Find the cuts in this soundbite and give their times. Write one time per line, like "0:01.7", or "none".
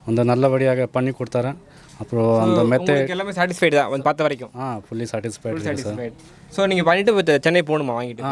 none